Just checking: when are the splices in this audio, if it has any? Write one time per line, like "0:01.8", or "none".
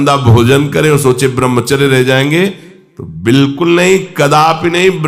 none

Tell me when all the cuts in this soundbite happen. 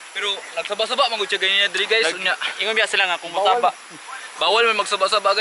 none

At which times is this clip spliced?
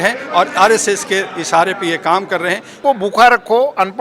0:02.7

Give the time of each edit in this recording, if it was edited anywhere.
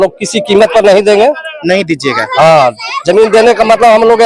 none

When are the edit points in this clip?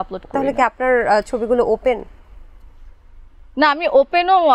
none

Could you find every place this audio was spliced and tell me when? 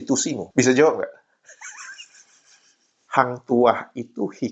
0:03.0

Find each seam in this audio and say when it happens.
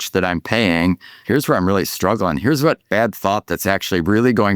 0:01.1
0:02.8

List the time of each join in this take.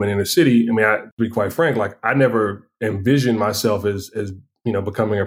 0:01.1

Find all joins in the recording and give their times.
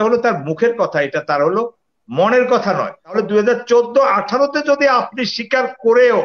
0:03.1

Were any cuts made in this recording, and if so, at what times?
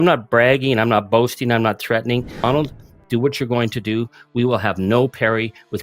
0:02.3

